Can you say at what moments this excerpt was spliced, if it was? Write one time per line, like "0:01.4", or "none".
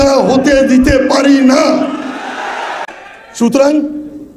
0:02.8